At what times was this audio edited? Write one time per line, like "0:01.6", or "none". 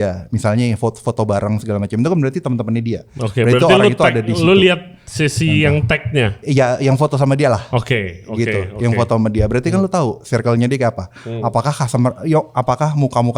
none